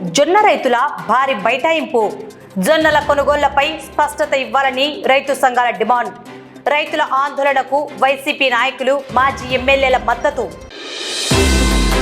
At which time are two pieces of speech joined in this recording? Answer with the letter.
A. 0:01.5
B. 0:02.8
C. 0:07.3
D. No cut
D